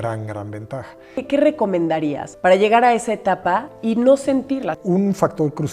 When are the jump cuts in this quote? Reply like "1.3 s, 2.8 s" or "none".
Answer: 1.2 s, 2.3 s, 3.7 s, 4.8 s